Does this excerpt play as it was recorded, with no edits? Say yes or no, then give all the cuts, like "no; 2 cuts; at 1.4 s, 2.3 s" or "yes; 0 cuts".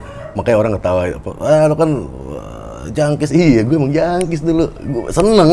yes; 0 cuts